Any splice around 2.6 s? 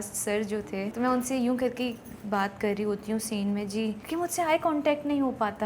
no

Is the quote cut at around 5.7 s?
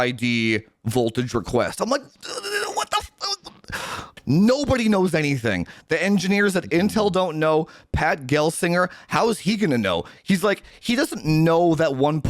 no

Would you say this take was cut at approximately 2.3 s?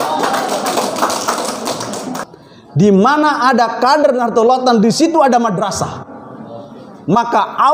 yes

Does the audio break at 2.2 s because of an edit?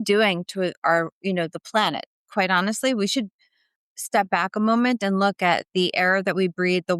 yes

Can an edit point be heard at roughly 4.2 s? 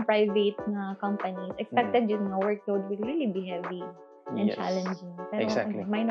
no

